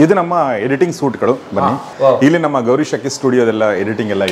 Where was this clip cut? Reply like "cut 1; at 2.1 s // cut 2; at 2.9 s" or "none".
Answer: cut 1; at 1.9 s